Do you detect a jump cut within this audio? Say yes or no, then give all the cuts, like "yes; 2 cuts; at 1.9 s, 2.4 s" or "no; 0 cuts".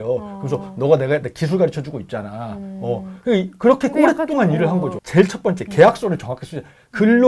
yes; 1 cut; at 5.0 s